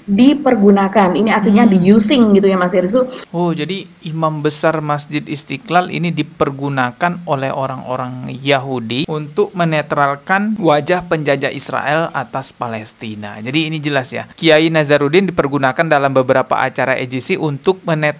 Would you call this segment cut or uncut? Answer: uncut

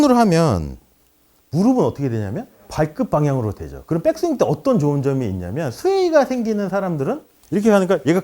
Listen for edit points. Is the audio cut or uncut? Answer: uncut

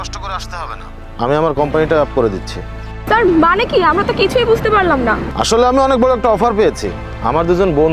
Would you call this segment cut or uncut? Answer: uncut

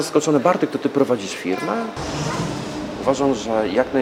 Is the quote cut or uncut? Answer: cut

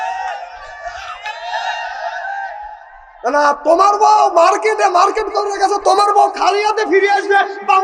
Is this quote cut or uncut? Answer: uncut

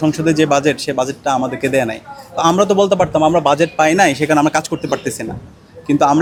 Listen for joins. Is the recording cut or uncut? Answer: uncut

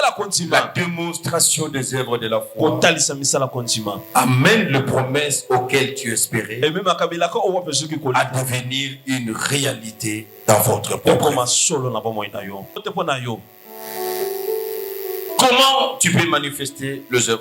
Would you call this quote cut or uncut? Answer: cut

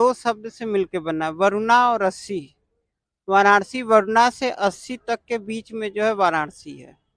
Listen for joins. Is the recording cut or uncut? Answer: uncut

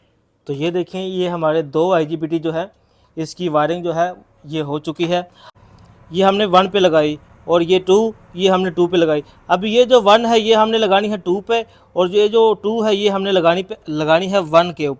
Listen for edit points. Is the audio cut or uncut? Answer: cut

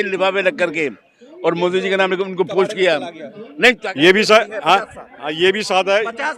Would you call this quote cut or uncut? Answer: cut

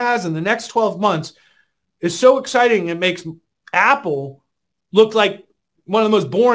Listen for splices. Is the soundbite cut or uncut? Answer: uncut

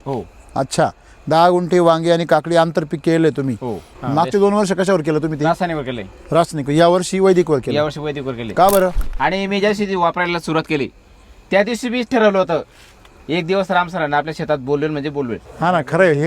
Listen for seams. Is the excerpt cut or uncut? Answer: cut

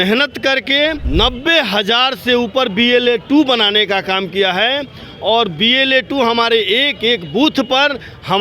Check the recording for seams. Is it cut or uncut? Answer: cut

